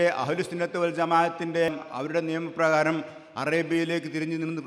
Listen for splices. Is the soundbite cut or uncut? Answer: cut